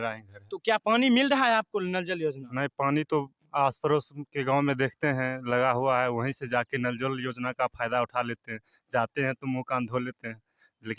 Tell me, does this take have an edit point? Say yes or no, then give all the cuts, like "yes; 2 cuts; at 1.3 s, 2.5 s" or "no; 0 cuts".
no; 0 cuts